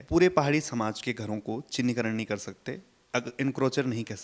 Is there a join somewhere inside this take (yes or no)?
yes